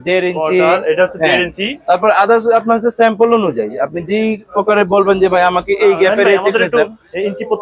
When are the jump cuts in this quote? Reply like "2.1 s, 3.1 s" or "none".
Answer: none